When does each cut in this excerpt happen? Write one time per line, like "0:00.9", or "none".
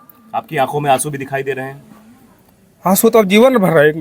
none